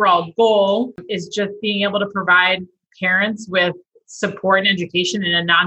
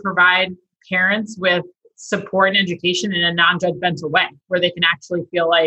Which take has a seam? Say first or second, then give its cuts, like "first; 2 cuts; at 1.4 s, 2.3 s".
first; 1 cut; at 1.0 s